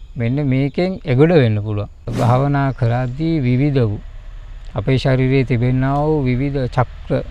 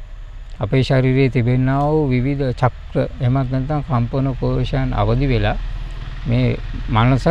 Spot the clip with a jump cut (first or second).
first